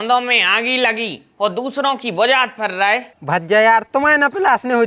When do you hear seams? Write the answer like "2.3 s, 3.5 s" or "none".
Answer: 3.1 s

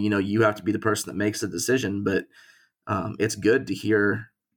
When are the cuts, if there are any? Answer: none

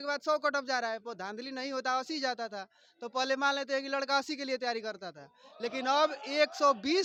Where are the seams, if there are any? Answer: none

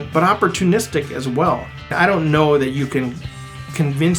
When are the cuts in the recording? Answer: 1.9 s

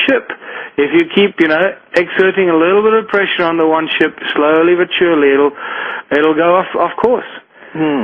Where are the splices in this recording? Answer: 6.7 s

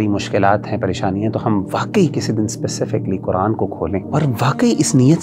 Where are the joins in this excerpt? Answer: 4.1 s

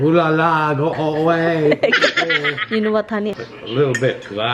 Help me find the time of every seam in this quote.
3.3 s

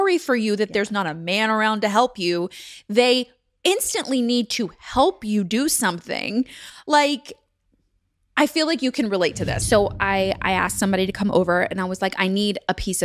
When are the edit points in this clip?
9.5 s

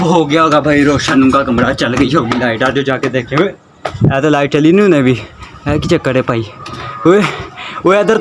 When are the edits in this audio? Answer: none

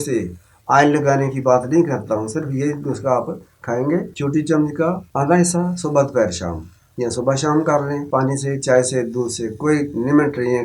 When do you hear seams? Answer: 4.1 s, 5.0 s, 8.0 s

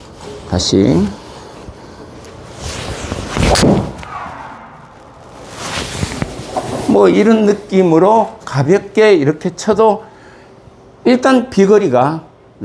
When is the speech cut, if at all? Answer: none

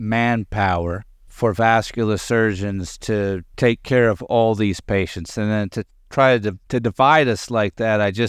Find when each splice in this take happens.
1.3 s, 3.5 s, 6.6 s

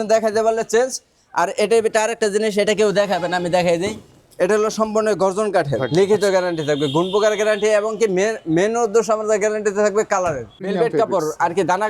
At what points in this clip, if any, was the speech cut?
5.8 s, 10.7 s

